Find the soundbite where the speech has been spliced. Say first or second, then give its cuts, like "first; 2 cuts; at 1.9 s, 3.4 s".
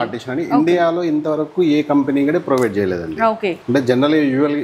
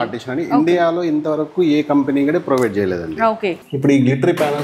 second; 1 cut; at 3.6 s